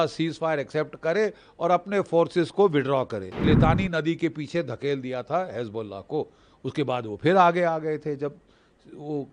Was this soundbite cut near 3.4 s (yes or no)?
yes